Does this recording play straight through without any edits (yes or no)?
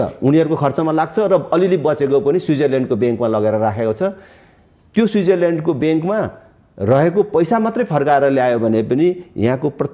yes